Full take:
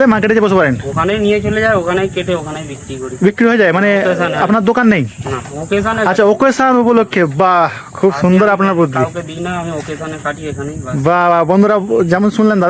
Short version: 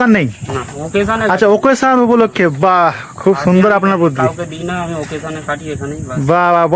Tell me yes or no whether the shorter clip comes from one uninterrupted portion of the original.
yes